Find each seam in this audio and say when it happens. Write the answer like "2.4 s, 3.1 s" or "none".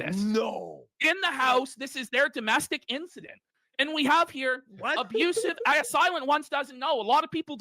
none